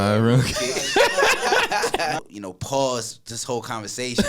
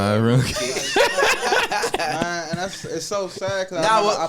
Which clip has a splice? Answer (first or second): first